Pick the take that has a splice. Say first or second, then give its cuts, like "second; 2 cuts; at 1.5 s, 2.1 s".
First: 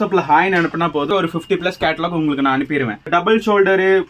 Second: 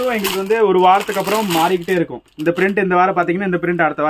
first; 2 cuts; at 1.1 s, 3.0 s